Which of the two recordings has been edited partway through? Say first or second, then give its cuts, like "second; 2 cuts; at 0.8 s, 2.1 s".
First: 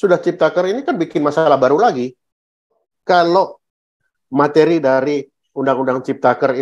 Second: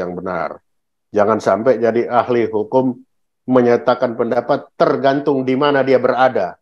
first; 1 cut; at 2.8 s